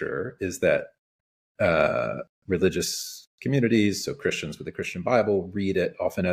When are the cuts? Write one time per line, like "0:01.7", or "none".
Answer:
none

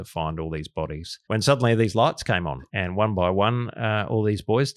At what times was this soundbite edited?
0:01.1
0:02.6

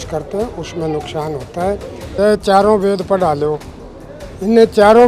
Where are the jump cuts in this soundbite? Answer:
0:02.0

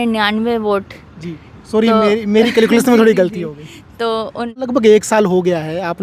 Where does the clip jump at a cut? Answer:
0:04.6

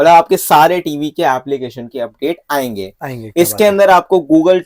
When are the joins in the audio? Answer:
none

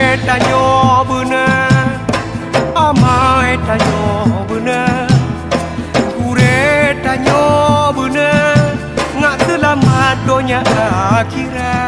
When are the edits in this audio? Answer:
none

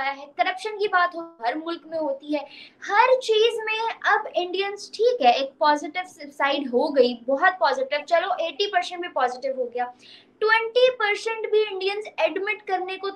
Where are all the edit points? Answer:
none

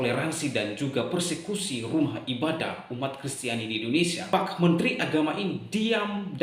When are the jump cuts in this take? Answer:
0:04.3

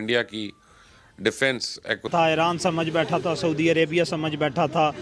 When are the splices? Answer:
0:02.0

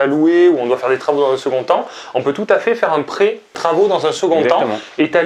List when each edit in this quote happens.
0:03.5

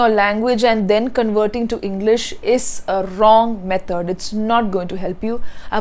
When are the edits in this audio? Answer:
none

